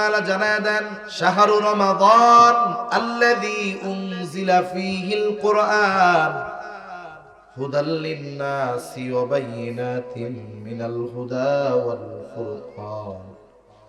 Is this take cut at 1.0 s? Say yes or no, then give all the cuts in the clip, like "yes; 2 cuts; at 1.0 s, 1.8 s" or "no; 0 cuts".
yes; 1 cut; at 1.0 s